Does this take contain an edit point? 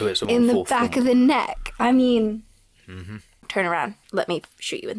yes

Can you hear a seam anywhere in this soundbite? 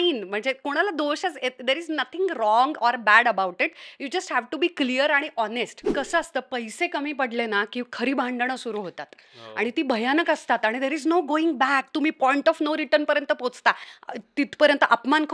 yes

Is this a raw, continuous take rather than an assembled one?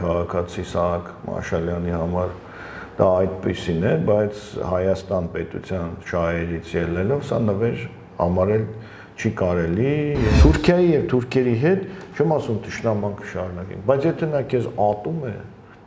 no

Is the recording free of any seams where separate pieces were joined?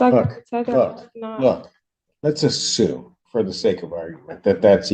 yes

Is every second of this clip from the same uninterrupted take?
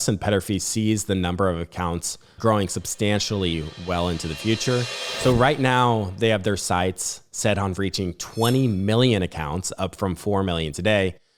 yes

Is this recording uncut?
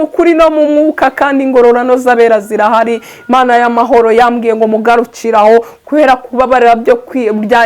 no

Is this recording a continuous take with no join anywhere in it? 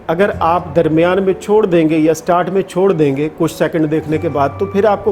yes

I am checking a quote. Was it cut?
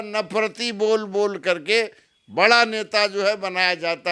no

